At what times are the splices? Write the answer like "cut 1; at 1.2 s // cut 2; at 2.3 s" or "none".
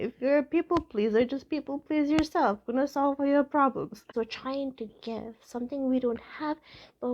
cut 1; at 4.1 s